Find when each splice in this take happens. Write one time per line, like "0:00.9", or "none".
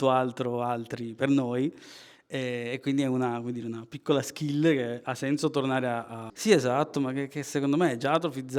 0:06.2